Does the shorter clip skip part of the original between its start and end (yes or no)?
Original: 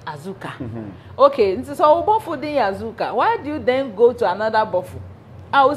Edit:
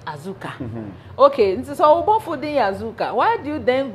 no